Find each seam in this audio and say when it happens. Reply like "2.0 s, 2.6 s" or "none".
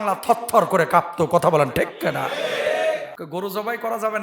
3.2 s